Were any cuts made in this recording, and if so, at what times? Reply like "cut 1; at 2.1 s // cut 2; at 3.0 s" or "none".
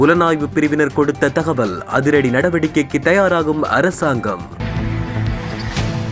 cut 1; at 4.5 s